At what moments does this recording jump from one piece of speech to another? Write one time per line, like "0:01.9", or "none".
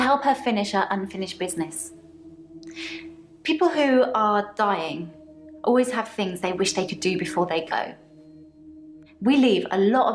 0:00.9